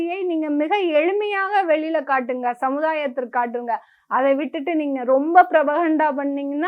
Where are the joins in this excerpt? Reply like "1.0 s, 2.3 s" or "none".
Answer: none